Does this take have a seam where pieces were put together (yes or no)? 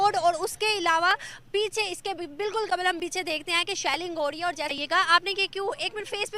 yes